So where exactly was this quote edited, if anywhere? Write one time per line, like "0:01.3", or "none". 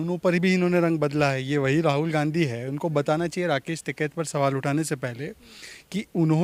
none